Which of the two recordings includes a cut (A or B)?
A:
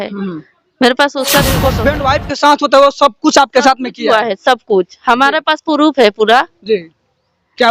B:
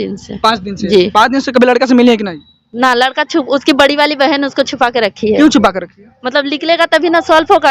A